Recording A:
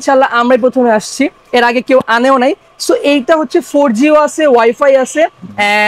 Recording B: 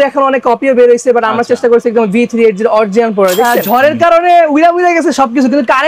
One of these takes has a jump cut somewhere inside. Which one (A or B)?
B